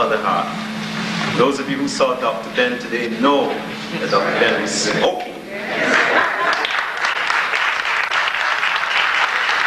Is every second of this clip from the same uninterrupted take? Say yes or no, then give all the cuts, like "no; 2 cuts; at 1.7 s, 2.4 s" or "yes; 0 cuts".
yes; 0 cuts